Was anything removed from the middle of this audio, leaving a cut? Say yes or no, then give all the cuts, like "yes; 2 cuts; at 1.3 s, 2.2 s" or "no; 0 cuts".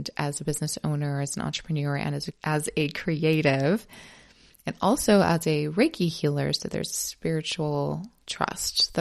no; 0 cuts